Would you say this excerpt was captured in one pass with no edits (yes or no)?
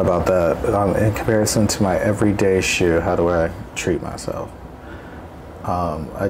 yes